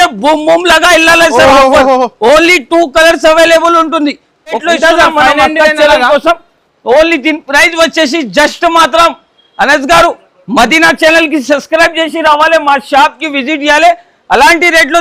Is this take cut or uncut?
cut